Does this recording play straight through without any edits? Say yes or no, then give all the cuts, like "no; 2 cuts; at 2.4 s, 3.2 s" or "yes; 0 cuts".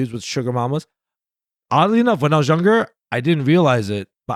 yes; 0 cuts